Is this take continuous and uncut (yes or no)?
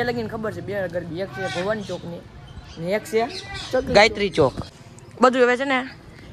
no